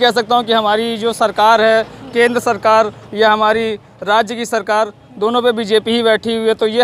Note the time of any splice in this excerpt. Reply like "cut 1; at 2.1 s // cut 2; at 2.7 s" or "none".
none

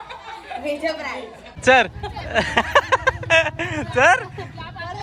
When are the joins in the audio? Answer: cut 1; at 1.6 s

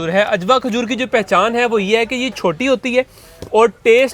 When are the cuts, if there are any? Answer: none

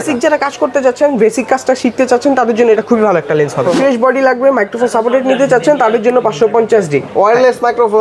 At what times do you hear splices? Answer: cut 1; at 3.8 s

